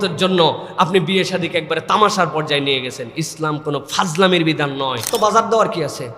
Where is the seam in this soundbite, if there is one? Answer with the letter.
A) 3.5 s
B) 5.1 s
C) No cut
B